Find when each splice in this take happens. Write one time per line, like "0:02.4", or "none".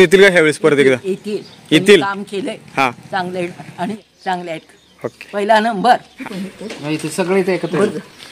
0:03.9
0:06.1